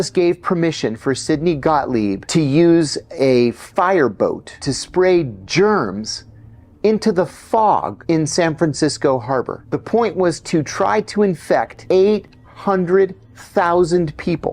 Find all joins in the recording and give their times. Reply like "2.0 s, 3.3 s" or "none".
2.2 s, 4.7 s, 7.9 s, 9.6 s, 11.8 s